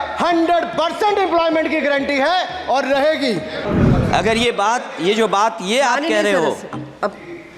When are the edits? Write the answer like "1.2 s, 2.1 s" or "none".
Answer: 3.7 s